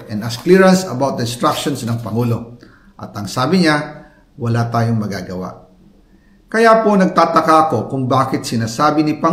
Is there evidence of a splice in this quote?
no; 0 cuts

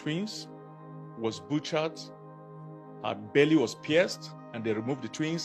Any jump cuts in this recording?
no; 0 cuts

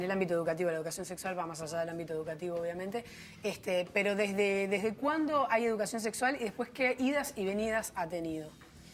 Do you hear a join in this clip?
yes; 1 cut; at 4.9 s

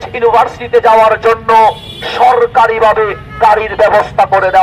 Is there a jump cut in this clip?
no; 0 cuts

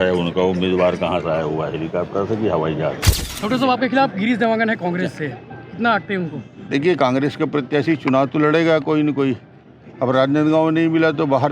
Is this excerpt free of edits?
no; 1 cut; at 3.2 s

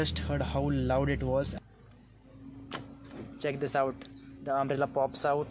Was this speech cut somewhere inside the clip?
yes; 1 cut; at 1.5 s

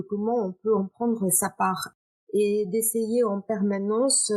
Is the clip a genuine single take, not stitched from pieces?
no; 1 cut; at 1.9 s

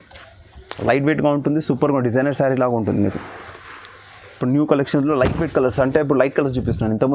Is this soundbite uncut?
yes; 0 cuts

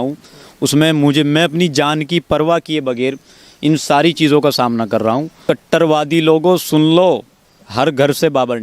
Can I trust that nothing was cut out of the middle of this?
no; 1 cut; at 5.4 s

